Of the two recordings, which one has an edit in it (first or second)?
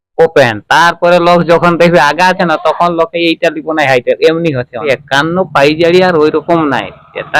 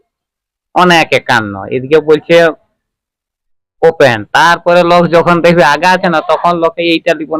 first